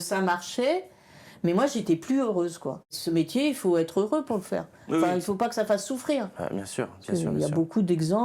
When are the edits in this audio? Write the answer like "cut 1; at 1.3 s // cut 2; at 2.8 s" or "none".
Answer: cut 1; at 2.9 s